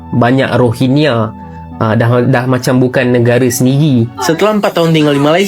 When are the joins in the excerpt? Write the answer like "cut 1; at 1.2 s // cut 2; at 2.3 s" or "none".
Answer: cut 1; at 4.2 s

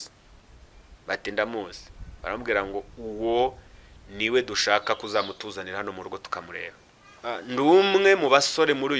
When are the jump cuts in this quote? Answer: cut 1; at 7.2 s

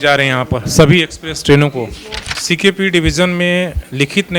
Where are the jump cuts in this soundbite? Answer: cut 1; at 2.2 s

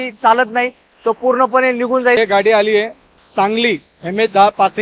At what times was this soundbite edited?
cut 1; at 2.2 s

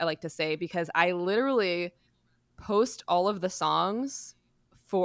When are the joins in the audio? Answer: none

